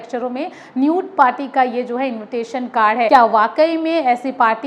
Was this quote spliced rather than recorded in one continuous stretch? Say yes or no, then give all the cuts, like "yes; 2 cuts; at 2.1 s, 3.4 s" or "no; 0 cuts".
yes; 1 cut; at 3.1 s